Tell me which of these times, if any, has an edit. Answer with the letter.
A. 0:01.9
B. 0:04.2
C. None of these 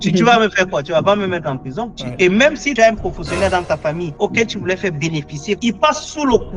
A